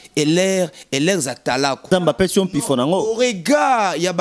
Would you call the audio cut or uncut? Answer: cut